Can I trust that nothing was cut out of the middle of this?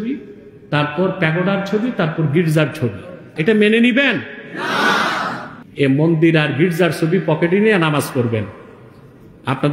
no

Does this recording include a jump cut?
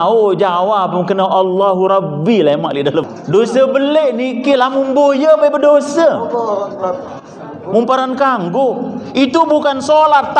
yes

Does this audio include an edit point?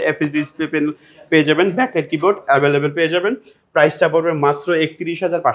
no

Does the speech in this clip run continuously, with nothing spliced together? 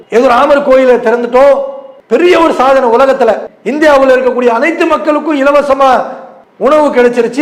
yes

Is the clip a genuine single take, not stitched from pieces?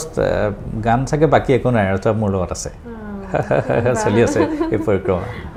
yes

